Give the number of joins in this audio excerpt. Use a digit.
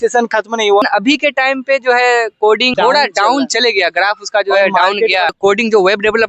3